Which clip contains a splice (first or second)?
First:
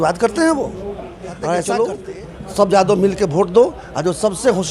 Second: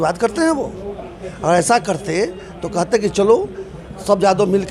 first